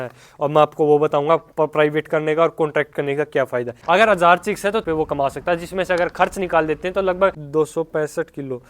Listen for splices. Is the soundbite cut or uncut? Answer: cut